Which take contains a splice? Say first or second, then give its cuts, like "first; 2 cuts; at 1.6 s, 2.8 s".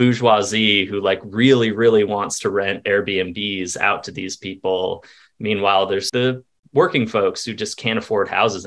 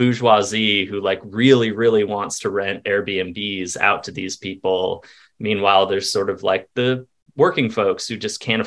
first; 1 cut; at 6.1 s